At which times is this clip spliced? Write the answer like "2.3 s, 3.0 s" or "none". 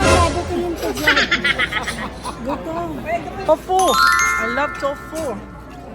3.5 s

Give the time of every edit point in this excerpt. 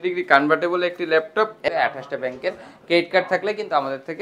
1.7 s

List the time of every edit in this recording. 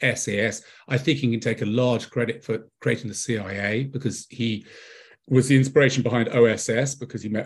none

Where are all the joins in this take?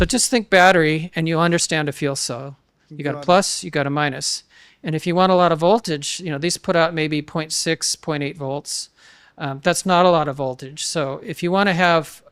none

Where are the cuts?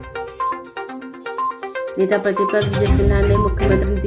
0.9 s

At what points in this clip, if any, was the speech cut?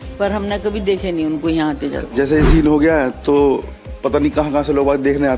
2.1 s

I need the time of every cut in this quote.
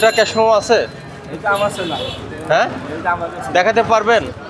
none

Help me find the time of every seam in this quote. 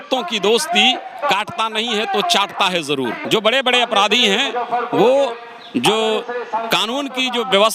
3.2 s

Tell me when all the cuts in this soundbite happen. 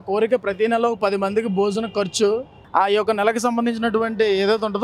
none

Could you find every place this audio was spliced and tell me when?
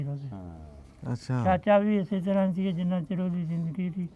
none

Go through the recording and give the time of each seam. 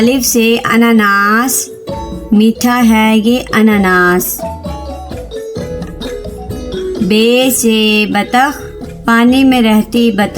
4.9 s, 7.0 s

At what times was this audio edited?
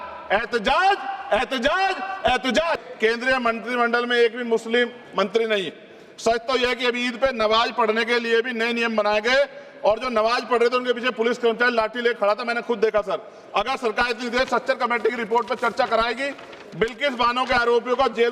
2.8 s

